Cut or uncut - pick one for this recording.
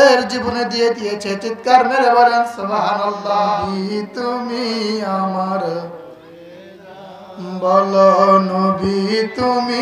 cut